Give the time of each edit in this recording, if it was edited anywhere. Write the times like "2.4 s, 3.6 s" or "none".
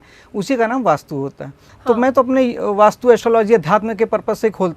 1.7 s

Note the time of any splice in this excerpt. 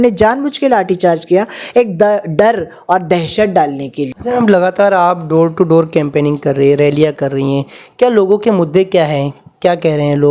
4.1 s

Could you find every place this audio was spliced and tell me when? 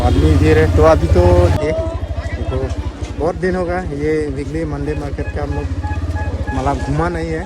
1.5 s

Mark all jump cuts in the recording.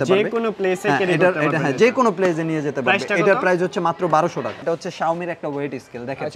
4.6 s

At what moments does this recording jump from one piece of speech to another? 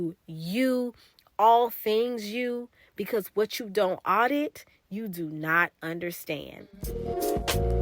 6.7 s

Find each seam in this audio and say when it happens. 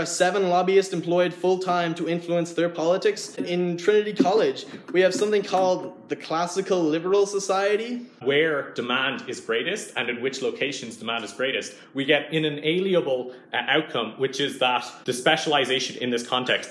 3.4 s, 8.2 s, 14.9 s

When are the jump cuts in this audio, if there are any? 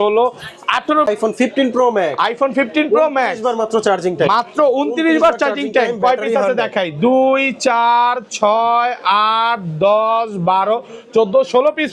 1.1 s

